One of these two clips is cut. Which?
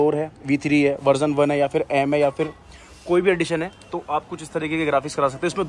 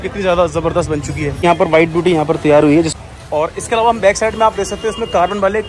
second; 2 cuts; at 1.4 s, 3.0 s

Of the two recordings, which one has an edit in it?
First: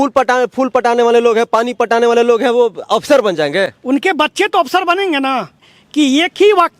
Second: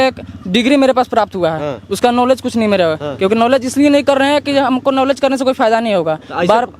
first; 1 cut; at 5.7 s

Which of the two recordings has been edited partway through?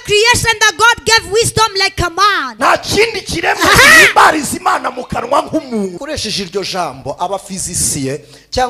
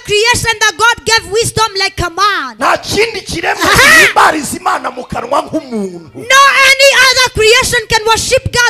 first; 1 cut; at 6.0 s

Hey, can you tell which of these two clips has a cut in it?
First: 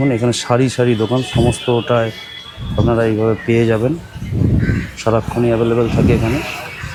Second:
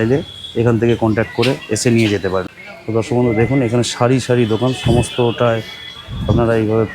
second; 1 cut; at 2.5 s

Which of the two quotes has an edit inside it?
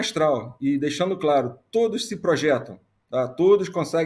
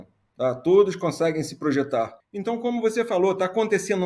second; 1 cut; at 2.2 s

